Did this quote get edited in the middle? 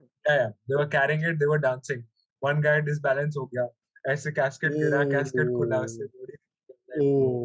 no; 0 cuts

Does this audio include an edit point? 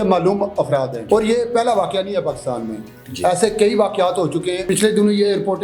yes; 2 cuts; at 1.0 s, 4.6 s

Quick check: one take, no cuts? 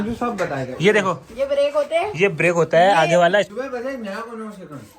no; 1 cut; at 3.5 s

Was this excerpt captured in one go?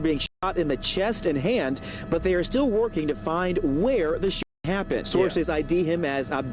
no; 1 cut; at 5.0 s

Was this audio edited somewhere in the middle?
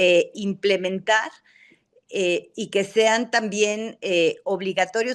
no; 0 cuts

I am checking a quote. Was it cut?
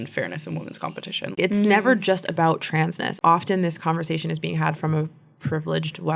yes; 2 cuts; at 1.3 s, 3.1 s

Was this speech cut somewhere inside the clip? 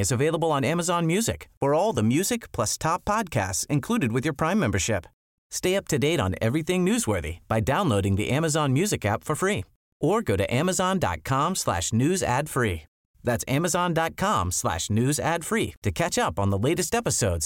no; 0 cuts

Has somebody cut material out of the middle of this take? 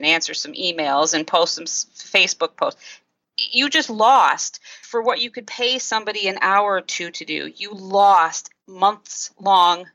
yes; 2 cuts; at 4.8 s, 8.7 s

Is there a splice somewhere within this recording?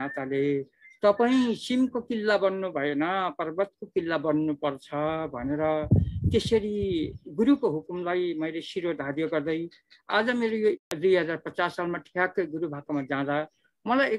yes; 1 cut; at 10.7 s

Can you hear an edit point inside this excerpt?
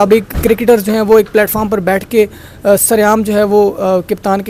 no; 0 cuts

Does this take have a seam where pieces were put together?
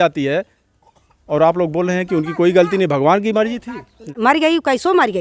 yes; 1 cut; at 4.1 s

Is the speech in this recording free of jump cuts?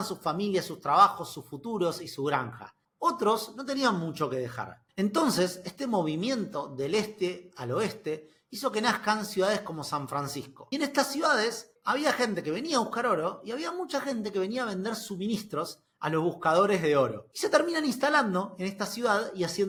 yes; 0 cuts

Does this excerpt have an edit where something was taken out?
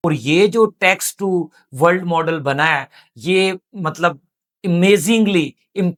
no; 0 cuts

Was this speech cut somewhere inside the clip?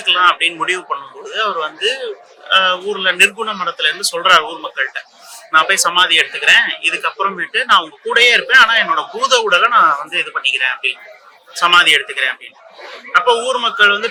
no; 0 cuts

